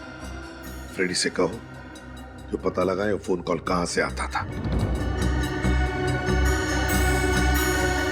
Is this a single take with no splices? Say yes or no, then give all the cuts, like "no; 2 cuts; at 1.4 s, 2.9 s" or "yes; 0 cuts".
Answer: no; 1 cut; at 4.9 s